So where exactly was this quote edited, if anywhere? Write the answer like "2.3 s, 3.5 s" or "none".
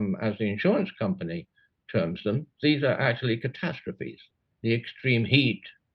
4.2 s